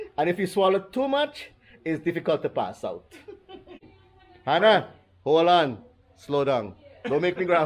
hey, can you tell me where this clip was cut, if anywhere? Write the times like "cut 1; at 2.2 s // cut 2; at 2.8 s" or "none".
cut 1; at 3.9 s